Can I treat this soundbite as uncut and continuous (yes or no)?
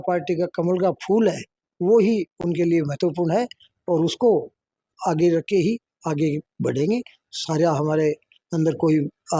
yes